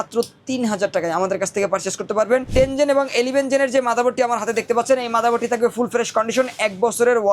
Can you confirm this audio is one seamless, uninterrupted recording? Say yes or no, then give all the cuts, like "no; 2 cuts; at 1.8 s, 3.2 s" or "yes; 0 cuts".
no; 1 cut; at 2.5 s